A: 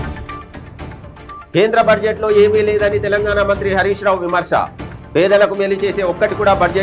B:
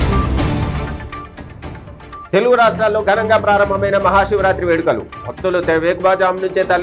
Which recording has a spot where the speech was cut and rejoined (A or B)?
B